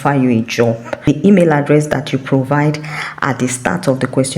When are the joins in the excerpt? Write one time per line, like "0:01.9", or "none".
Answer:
0:01.1